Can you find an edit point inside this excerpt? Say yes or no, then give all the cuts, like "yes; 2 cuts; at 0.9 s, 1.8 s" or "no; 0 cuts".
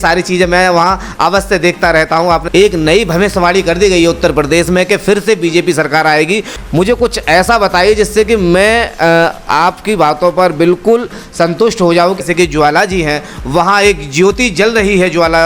yes; 3 cuts; at 2.5 s, 6.5 s, 12.2 s